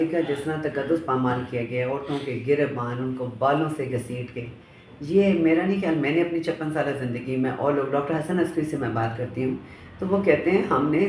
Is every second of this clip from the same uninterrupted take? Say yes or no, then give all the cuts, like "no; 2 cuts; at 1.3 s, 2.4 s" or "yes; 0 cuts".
yes; 0 cuts